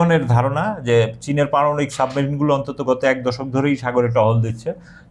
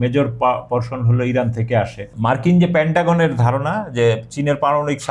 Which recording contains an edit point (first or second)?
second